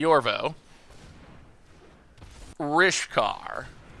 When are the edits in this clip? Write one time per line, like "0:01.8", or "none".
0:02.5